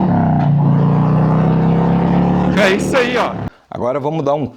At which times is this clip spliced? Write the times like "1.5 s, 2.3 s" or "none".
3.4 s